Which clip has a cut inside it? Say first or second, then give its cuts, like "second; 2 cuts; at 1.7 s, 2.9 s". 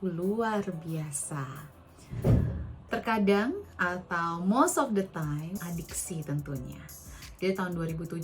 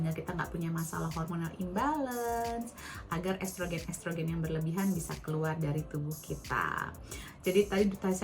first; 1 cut; at 5.6 s